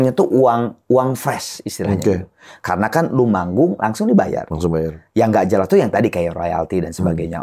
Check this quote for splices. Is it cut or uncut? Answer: uncut